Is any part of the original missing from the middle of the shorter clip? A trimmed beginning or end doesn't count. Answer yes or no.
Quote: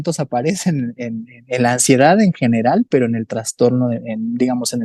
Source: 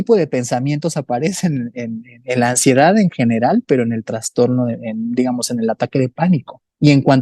no